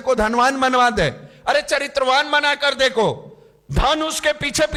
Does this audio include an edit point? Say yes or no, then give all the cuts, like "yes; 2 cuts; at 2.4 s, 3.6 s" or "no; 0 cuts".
no; 0 cuts